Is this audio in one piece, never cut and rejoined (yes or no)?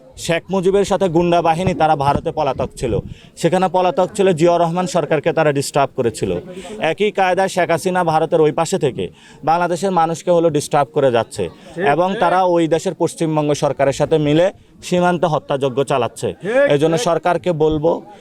yes